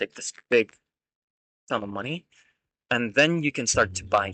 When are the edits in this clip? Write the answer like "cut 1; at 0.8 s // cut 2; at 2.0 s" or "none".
none